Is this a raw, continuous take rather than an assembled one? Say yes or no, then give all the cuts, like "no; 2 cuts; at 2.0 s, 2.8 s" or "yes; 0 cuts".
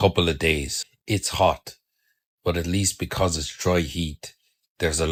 yes; 0 cuts